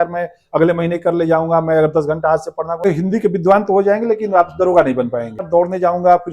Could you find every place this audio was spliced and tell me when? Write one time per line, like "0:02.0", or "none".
0:02.8
0:05.4